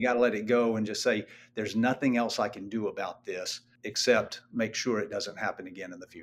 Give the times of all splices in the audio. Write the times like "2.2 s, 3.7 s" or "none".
3.6 s

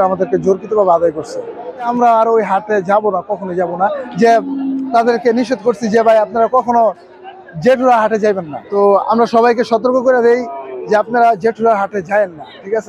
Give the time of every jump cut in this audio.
1.9 s, 4.0 s, 8.6 s

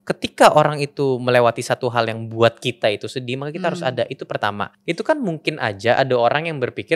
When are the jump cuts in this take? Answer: 4.7 s

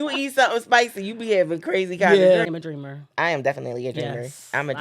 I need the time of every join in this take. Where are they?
2.5 s

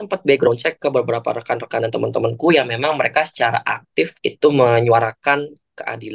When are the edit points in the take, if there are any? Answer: 4.1 s

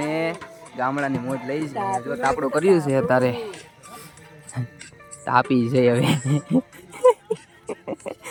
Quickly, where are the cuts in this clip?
none

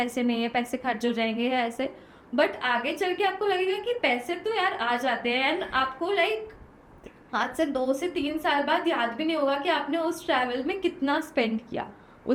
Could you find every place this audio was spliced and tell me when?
none

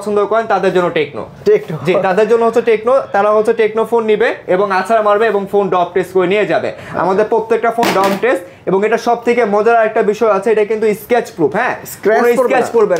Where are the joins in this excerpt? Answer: none

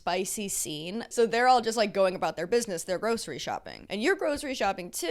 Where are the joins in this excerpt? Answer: 1.1 s, 3.7 s

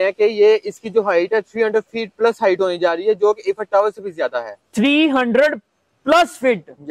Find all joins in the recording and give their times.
none

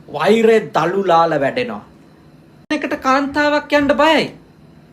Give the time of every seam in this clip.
2.7 s

